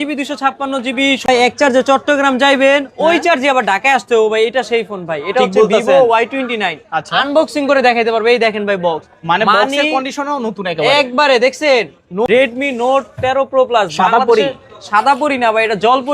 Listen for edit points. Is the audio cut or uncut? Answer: cut